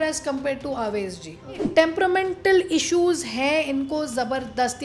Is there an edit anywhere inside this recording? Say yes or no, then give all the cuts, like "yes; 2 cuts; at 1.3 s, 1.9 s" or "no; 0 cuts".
yes; 1 cut; at 1.7 s